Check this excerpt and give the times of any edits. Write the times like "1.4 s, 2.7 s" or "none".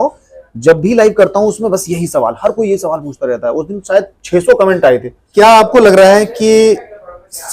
5.2 s